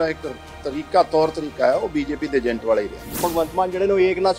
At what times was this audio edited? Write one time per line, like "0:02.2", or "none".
0:03.1